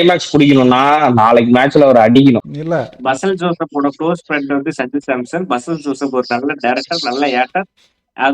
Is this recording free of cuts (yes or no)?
no